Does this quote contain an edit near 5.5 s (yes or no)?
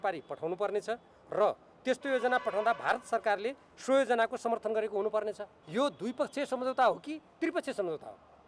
yes